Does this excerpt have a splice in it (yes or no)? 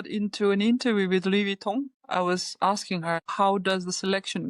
yes